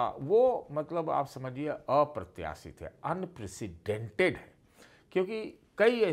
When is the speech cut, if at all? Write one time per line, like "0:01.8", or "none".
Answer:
none